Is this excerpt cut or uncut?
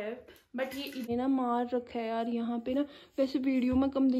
cut